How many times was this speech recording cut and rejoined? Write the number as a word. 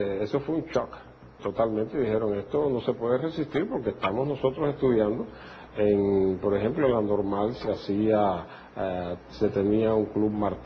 one